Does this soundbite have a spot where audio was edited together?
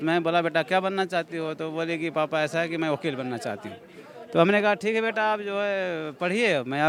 no; 0 cuts

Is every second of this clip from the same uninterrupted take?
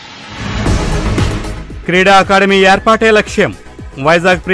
no; 1 cut; at 0.9 s

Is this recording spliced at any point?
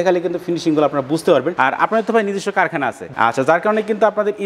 no; 0 cuts

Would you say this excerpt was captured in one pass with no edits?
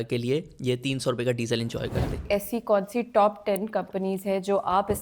no; 1 cut; at 2.2 s

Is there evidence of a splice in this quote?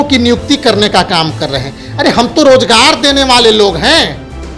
no; 0 cuts

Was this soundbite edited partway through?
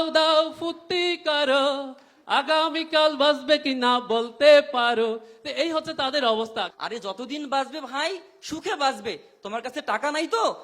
yes; 1 cut; at 6.7 s

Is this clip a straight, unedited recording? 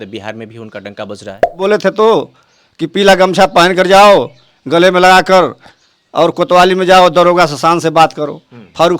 no; 1 cut; at 1.6 s

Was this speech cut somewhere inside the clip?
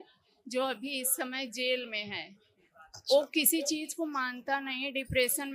no; 0 cuts

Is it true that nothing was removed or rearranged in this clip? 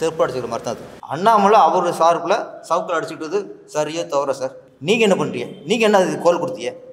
no; 2 cuts; at 0.9 s, 4.7 s

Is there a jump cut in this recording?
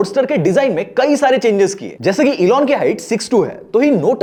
no; 0 cuts

